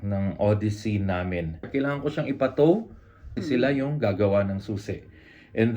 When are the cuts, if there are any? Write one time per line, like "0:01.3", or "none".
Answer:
0:01.7
0:03.3